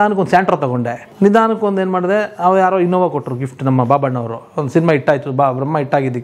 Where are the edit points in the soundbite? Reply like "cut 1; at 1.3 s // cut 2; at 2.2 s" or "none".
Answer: cut 1; at 1.0 s